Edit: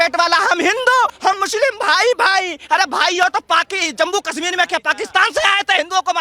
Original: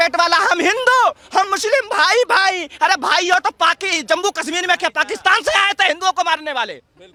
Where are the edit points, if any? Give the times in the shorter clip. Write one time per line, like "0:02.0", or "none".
0:01.0